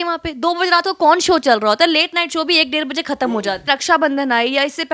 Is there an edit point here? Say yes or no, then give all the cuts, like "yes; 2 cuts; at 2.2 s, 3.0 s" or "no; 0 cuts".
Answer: yes; 1 cut; at 3.6 s